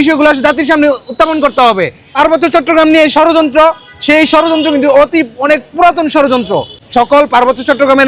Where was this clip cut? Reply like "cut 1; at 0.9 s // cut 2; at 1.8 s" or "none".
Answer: cut 1; at 2.2 s // cut 2; at 6.8 s

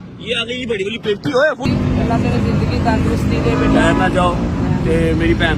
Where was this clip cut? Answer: cut 1; at 1.6 s

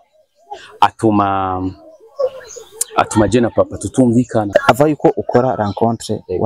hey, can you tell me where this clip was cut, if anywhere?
cut 1; at 4.5 s

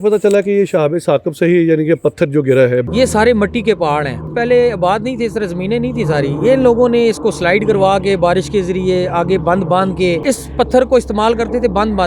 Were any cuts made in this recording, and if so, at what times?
cut 1; at 2.9 s // cut 2; at 4.3 s // cut 3; at 10.2 s

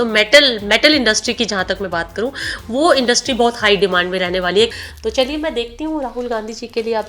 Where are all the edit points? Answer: cut 1; at 4.7 s

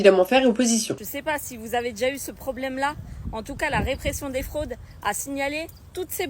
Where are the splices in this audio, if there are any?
cut 1; at 1.0 s

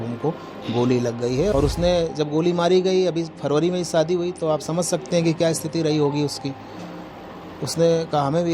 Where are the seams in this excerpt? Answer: cut 1; at 1.5 s

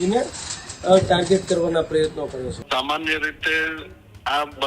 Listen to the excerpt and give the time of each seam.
cut 1; at 2.6 s

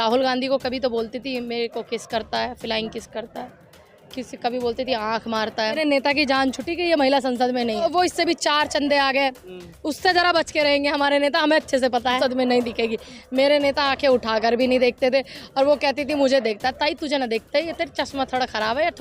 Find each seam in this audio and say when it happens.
cut 1; at 5.8 s // cut 2; at 7.8 s // cut 3; at 12.2 s

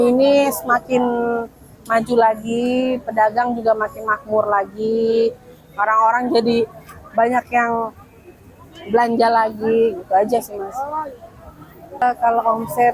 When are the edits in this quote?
cut 1; at 12.0 s

